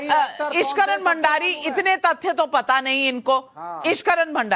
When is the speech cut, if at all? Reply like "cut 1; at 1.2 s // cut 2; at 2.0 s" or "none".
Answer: cut 1; at 3.6 s